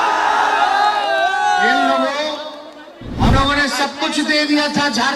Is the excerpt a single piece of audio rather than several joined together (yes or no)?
no